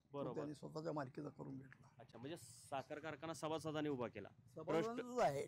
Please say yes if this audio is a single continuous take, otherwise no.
yes